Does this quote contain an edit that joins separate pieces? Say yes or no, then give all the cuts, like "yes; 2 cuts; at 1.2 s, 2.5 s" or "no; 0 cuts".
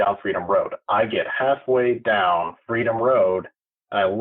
no; 0 cuts